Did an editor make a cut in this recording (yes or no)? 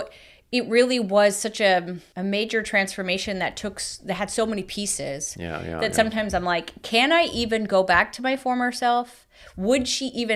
no